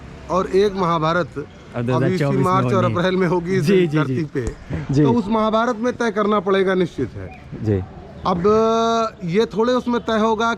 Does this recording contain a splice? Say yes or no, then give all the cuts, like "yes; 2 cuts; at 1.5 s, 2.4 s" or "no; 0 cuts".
no; 0 cuts